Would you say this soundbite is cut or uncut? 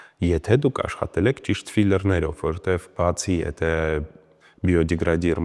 uncut